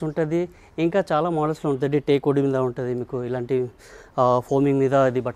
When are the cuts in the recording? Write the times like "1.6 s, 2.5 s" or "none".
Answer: none